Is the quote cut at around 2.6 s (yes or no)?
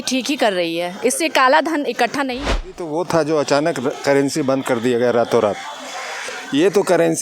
yes